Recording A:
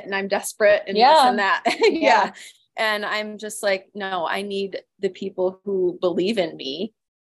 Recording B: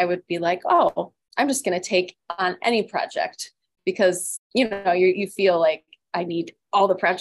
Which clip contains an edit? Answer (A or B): B